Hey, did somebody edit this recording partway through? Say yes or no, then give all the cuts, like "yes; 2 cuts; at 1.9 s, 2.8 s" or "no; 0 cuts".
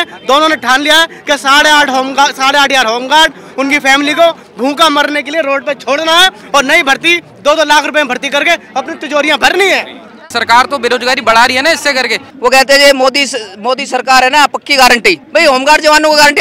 yes; 3 cuts; at 10.2 s, 12.2 s, 15.2 s